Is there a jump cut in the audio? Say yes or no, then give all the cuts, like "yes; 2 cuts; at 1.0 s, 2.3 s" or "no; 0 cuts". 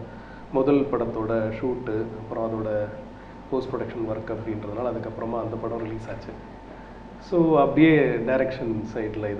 no; 0 cuts